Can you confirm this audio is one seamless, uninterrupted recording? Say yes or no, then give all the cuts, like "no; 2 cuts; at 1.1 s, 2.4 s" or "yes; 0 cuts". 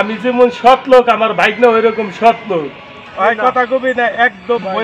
no; 1 cut; at 3.0 s